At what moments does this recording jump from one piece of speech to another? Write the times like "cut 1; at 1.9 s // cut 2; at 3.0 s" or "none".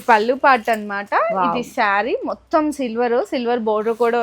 none